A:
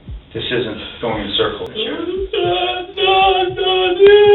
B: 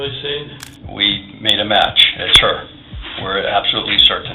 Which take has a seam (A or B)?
A